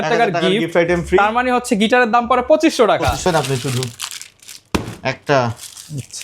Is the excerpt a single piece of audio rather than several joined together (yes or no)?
no